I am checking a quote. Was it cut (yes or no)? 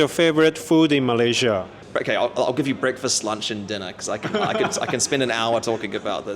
yes